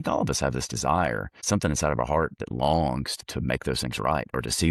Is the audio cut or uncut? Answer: cut